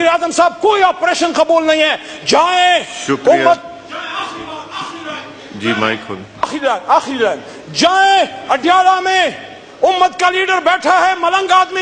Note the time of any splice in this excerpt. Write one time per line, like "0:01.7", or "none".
none